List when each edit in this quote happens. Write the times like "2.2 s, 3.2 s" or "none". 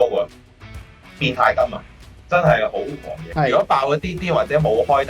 3.3 s